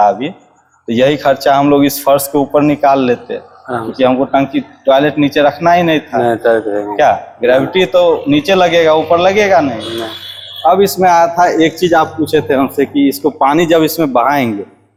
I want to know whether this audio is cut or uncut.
uncut